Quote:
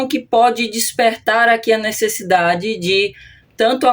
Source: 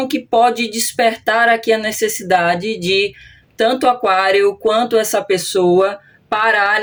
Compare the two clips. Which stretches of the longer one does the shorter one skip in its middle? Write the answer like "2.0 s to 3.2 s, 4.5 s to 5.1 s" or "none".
none